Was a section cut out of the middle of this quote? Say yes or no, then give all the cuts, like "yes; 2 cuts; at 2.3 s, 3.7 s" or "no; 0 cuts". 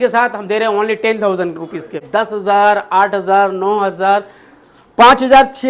yes; 1 cut; at 2.0 s